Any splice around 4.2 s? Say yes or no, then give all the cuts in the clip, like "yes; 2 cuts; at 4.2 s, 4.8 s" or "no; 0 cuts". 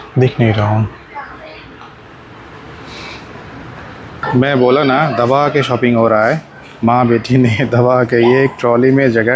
yes; 1 cut; at 4.2 s